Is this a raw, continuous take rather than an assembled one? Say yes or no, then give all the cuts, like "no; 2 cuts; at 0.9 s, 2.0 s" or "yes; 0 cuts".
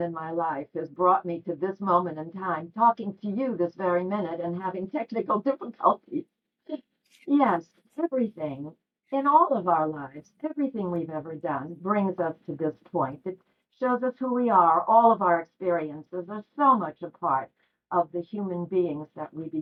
yes; 0 cuts